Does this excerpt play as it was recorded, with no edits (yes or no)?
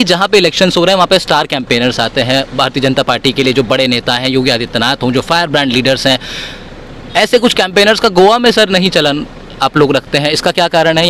yes